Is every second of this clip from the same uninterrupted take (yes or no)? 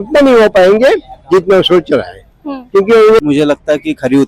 no